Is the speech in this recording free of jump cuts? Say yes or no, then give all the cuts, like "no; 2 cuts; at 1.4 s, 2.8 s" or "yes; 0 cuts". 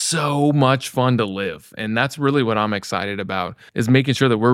yes; 0 cuts